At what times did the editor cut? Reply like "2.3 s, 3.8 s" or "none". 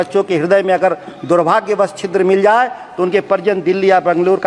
none